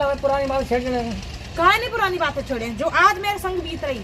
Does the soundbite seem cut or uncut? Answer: uncut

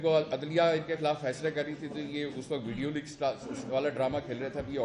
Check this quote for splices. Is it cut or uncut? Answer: uncut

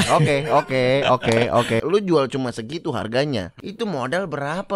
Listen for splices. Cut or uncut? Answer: cut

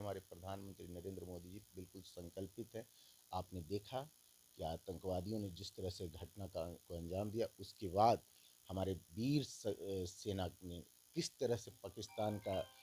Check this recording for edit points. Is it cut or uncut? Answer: uncut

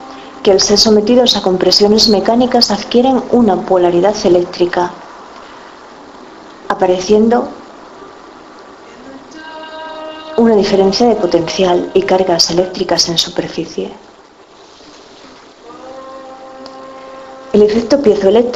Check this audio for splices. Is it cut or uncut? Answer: cut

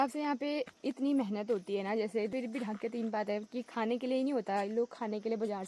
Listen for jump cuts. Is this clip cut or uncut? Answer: cut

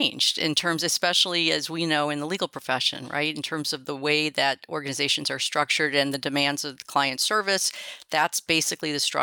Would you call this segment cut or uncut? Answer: uncut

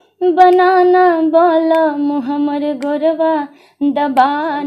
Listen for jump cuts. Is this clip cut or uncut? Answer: uncut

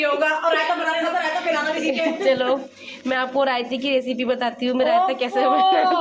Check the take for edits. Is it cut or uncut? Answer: uncut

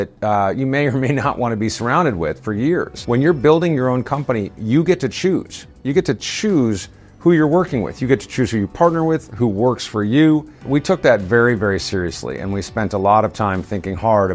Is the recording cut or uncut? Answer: uncut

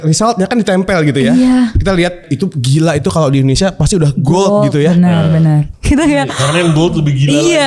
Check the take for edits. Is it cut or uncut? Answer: cut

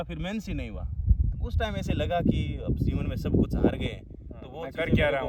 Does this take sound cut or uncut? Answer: uncut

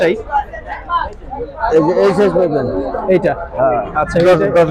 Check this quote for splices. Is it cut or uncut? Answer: uncut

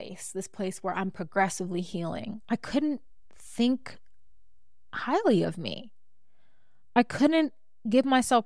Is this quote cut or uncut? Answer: uncut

